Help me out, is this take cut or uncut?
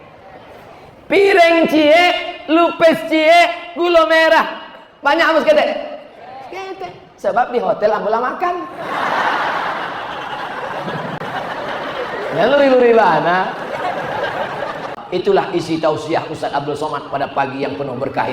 uncut